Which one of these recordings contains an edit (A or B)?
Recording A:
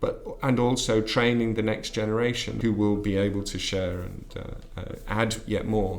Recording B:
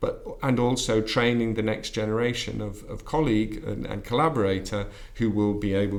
A